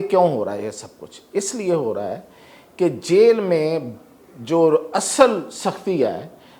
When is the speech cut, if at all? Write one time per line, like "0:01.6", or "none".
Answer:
none